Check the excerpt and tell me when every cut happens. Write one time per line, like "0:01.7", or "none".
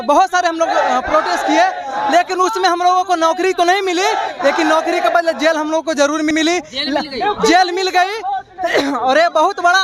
none